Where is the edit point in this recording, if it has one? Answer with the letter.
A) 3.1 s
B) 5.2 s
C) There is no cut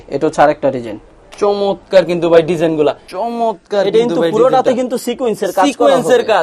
A